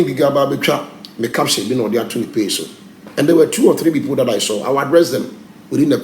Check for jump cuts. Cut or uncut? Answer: uncut